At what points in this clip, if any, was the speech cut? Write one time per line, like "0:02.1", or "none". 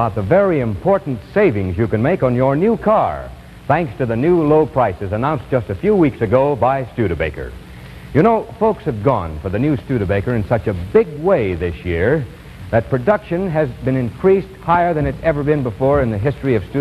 none